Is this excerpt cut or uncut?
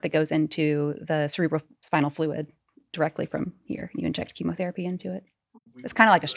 cut